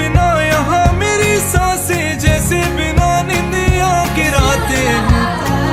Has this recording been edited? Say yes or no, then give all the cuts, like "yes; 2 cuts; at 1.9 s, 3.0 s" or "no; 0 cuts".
no; 0 cuts